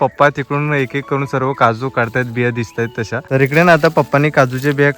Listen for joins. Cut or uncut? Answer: cut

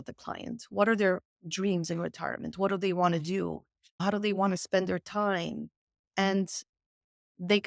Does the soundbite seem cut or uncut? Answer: uncut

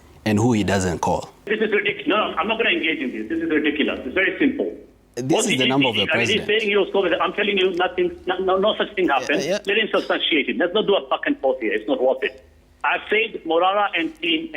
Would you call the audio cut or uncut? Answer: cut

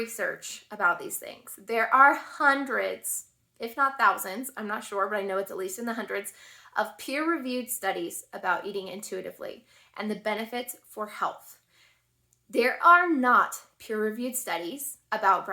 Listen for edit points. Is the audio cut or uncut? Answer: uncut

